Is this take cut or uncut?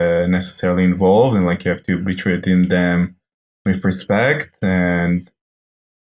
uncut